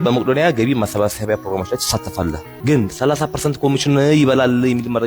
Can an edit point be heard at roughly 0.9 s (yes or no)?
no